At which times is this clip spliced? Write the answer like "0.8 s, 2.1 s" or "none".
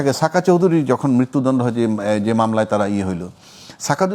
none